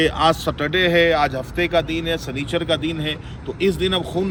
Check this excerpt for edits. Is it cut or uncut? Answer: uncut